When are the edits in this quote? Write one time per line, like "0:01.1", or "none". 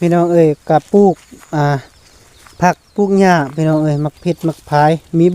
none